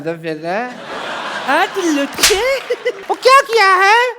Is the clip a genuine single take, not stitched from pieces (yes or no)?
no